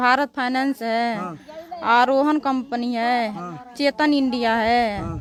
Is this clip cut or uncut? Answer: uncut